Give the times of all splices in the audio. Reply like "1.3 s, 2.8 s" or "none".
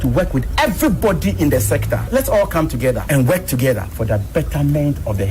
2.0 s, 3.0 s, 3.9 s